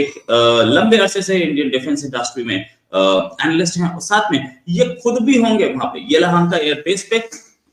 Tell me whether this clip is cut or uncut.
uncut